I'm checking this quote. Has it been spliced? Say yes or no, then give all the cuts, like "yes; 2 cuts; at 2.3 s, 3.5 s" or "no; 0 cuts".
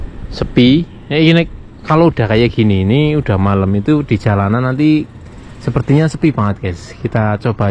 no; 0 cuts